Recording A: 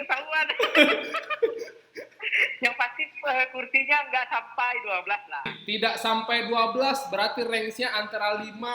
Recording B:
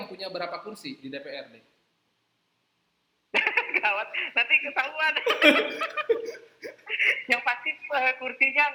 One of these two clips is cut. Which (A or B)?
A